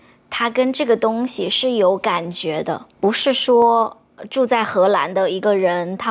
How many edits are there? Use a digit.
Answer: 1